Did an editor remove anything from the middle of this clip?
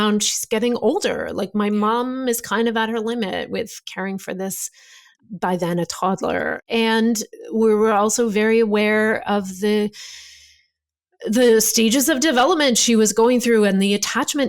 yes; 1 cut; at 6.6 s

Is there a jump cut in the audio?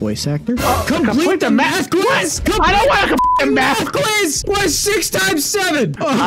no; 0 cuts

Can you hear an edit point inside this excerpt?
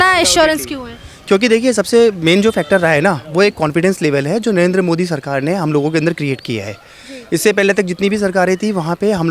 no; 0 cuts

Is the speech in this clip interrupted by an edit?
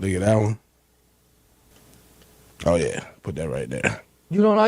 yes; 1 cut; at 1.7 s

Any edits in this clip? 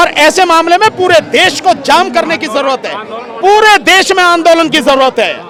no; 0 cuts

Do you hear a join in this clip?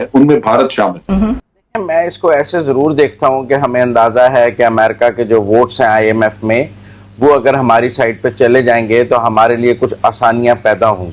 no; 0 cuts

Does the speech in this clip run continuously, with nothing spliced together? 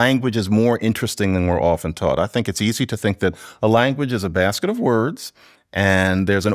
yes; 0 cuts

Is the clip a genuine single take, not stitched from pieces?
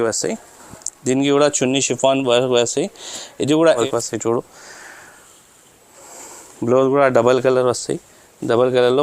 no; 1 cut; at 3.8 s

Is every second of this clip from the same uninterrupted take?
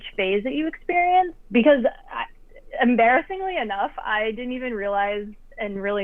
no; 1 cut; at 1.3 s

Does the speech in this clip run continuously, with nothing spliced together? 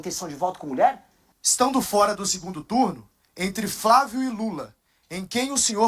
no; 1 cut; at 1.2 s

